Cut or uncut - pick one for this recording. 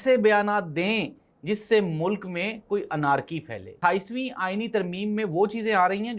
cut